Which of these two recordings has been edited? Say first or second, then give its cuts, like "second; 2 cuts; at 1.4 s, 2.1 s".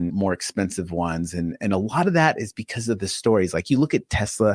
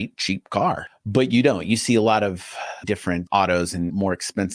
second; 2 cuts; at 0.9 s, 2.8 s